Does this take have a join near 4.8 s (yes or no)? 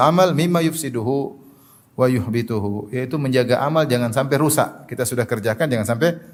no